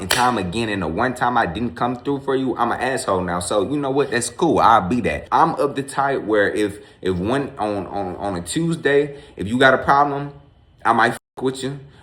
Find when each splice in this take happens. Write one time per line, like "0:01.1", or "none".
0:05.2